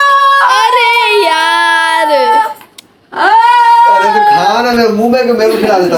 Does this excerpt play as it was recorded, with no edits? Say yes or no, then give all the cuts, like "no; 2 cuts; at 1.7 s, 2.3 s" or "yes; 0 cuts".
yes; 0 cuts